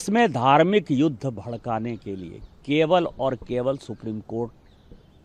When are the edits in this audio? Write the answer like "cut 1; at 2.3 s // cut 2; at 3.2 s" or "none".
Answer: none

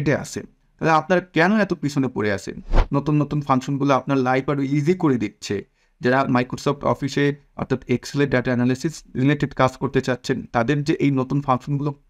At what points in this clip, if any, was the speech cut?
cut 1; at 2.7 s

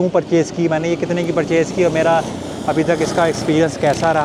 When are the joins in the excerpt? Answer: none

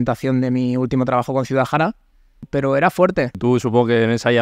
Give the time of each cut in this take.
cut 1; at 2.4 s // cut 2; at 3.4 s

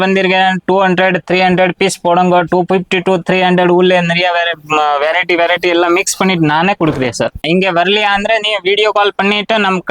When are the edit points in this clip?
cut 1; at 7.4 s

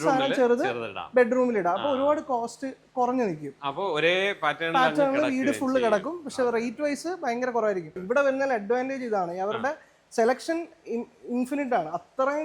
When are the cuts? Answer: cut 1; at 8.0 s

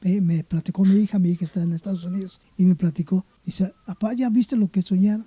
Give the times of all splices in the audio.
cut 1; at 2.4 s // cut 2; at 3.4 s

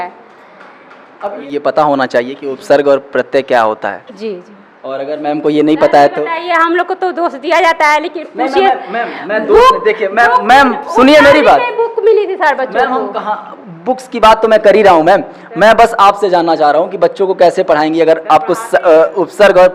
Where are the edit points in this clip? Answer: cut 1; at 1.4 s

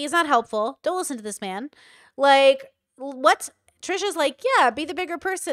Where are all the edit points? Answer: none

